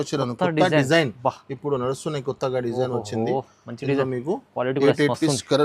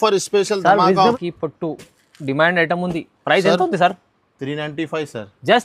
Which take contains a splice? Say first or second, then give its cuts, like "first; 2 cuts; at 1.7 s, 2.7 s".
second; 1 cut; at 1.2 s